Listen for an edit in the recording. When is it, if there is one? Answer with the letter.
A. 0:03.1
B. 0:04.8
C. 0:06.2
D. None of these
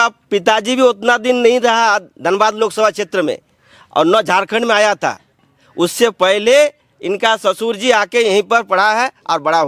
D